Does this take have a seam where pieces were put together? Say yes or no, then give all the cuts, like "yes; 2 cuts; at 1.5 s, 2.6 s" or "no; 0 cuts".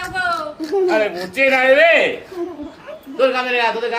no; 0 cuts